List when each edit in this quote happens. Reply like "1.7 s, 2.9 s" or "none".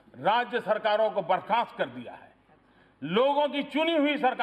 none